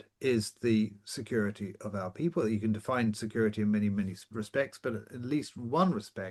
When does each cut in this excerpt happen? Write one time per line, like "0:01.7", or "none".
none